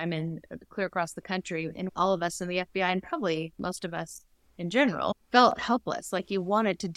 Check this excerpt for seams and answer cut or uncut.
cut